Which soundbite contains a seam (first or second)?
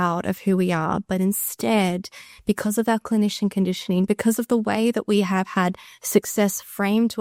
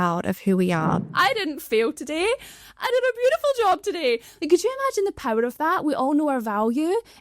second